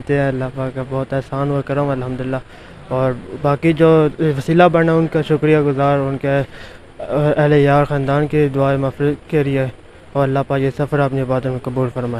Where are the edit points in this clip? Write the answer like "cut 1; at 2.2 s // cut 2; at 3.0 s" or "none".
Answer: none